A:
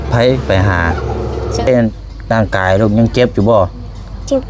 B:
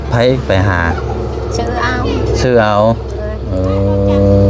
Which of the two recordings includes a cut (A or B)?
A